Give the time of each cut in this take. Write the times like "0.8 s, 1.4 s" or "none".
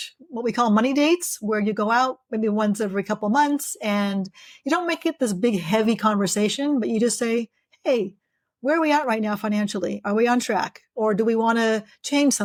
none